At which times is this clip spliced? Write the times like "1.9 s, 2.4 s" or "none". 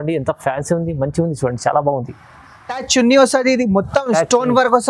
2.7 s